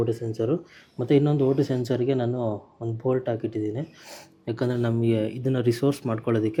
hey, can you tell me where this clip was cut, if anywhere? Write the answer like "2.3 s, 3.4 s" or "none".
none